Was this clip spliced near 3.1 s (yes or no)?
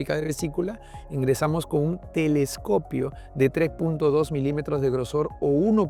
no